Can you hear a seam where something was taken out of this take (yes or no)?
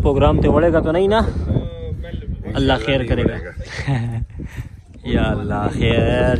no